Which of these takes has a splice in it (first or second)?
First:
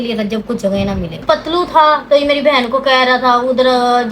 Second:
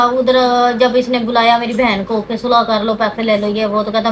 first